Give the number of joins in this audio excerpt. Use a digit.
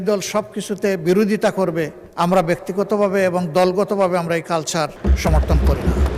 2